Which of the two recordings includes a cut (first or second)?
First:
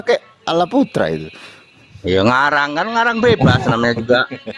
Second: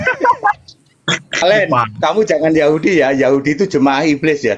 second